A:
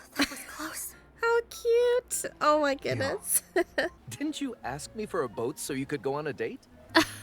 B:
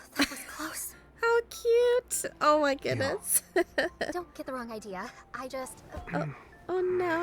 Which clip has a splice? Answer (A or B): A